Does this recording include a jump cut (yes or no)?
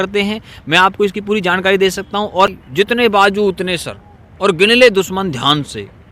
yes